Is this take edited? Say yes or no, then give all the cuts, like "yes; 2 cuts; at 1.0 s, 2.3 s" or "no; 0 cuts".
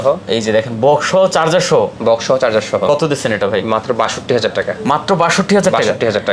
no; 0 cuts